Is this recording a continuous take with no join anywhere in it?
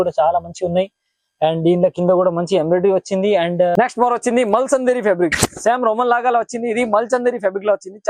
no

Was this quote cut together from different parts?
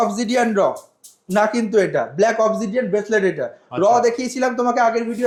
no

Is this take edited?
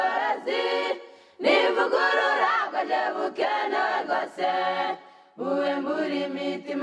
no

